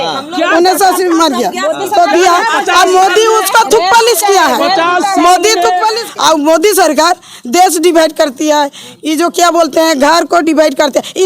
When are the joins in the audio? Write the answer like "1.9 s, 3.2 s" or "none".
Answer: 6.0 s